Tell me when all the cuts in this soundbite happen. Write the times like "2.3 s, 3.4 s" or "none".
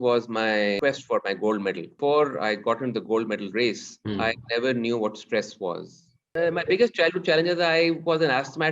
0.8 s, 1.9 s, 3.9 s, 6.3 s